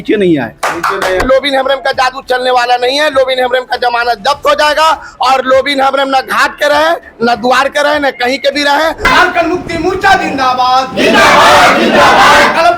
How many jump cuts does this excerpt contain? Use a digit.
2